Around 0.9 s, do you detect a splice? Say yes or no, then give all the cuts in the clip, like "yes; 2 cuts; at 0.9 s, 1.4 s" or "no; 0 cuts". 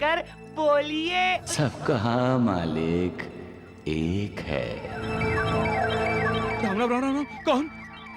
no; 1 cut; at 6.6 s